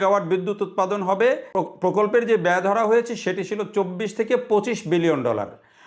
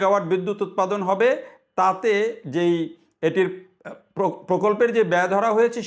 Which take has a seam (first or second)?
first